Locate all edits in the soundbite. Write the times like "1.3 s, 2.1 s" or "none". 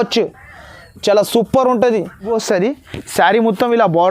2.3 s